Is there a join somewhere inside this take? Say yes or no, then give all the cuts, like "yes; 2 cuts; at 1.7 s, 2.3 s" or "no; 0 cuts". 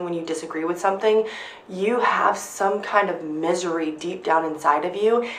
no; 0 cuts